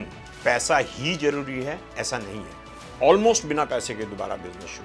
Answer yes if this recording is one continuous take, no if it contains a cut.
no